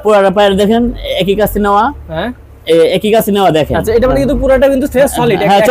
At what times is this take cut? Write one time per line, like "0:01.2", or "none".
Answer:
none